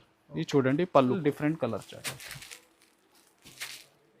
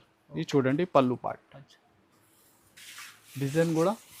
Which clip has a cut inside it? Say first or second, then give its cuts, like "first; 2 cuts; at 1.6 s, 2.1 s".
first; 1 cut; at 1.2 s